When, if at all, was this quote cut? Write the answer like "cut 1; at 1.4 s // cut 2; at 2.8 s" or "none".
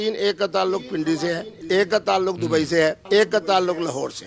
cut 1; at 1.5 s // cut 2; at 3.0 s